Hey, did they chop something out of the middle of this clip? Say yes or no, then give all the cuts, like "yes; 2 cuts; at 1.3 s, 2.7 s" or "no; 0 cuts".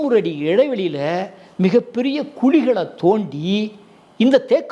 no; 0 cuts